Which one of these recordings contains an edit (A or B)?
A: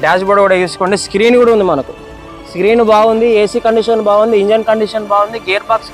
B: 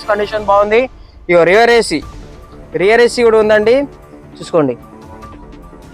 B